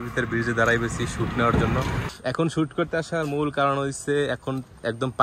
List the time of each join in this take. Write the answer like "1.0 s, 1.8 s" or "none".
2.1 s